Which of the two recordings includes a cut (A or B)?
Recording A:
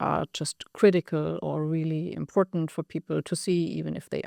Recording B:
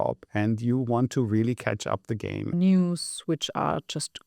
B